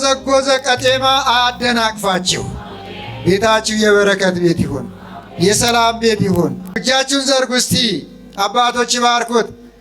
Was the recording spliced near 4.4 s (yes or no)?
no